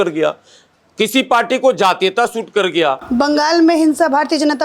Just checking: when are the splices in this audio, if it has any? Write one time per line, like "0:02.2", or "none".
0:03.0